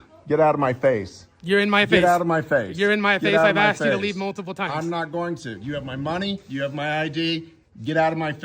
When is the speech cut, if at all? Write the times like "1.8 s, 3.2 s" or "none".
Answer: none